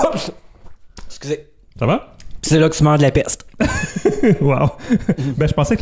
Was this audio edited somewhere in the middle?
no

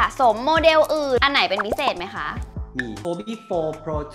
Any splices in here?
yes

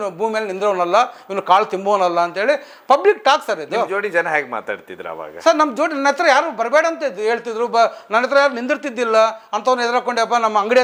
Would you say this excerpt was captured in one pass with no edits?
yes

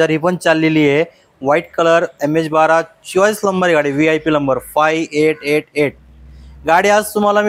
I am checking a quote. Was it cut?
no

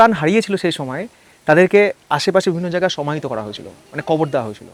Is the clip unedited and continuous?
yes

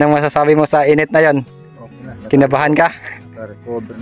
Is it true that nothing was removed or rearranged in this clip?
yes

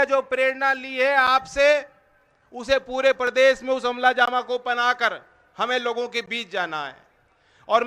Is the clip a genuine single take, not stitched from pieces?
yes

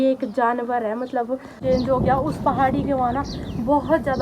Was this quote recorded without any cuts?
no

